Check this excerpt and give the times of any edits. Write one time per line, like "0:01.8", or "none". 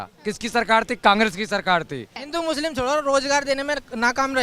0:02.2